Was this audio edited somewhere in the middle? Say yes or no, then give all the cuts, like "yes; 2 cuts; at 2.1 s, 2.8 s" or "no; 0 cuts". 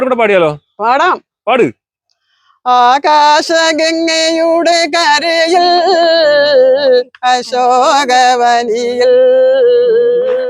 no; 0 cuts